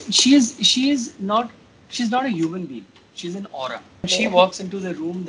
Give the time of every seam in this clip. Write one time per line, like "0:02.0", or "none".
0:04.1